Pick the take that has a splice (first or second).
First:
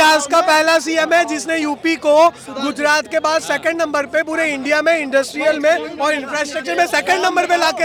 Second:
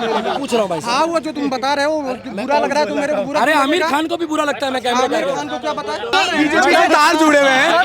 second